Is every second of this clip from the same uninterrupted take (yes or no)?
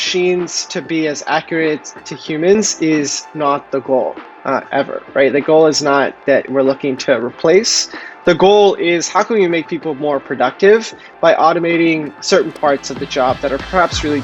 yes